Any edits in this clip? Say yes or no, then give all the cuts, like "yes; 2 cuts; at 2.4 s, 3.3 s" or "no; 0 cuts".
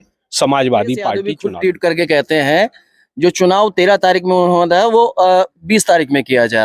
yes; 1 cut; at 1.3 s